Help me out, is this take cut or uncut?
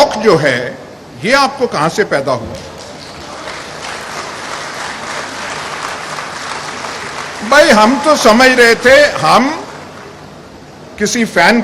uncut